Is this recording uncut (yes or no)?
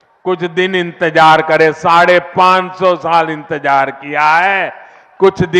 yes